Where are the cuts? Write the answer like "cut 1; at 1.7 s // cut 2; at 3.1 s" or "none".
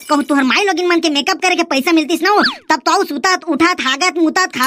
none

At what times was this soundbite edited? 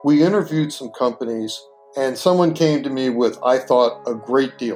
none

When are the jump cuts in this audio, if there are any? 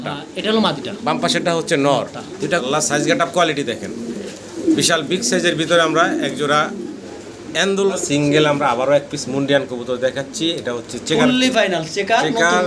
cut 1; at 2.6 s // cut 2; at 8.0 s

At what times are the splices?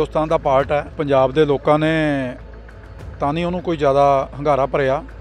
cut 1; at 0.9 s

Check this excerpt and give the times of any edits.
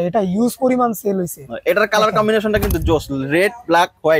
none

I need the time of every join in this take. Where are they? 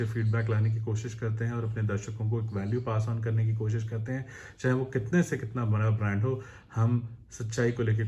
none

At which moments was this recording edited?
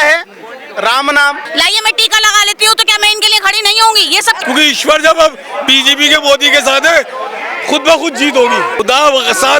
cut 1; at 1.4 s // cut 2; at 4.4 s // cut 3; at 8.8 s

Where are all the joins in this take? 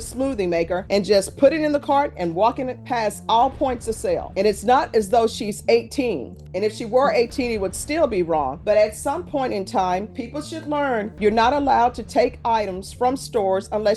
none

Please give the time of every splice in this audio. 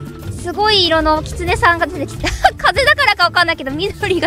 cut 1; at 2.2 s

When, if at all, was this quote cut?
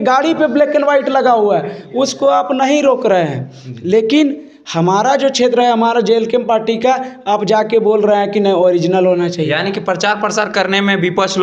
none

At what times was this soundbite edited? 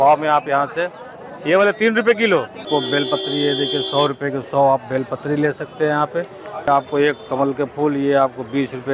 cut 1; at 2.7 s // cut 2; at 6.7 s

